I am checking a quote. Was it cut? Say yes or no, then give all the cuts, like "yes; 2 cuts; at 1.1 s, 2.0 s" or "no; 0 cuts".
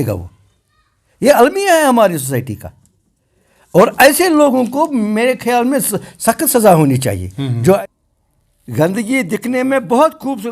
yes; 1 cut; at 7.8 s